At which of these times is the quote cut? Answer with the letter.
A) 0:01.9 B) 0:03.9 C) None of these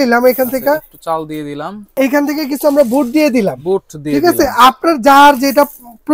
A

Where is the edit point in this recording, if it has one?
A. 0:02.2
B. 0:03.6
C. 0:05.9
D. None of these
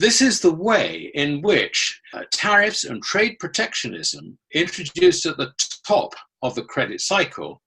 A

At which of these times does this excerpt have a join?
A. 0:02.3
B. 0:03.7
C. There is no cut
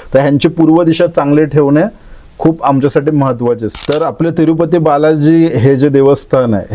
B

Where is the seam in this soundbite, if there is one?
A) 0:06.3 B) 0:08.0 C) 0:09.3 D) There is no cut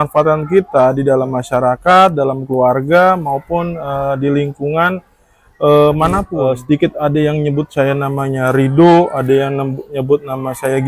A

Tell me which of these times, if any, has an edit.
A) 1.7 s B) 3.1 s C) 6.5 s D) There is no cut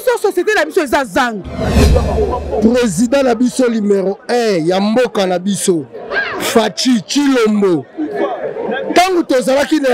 A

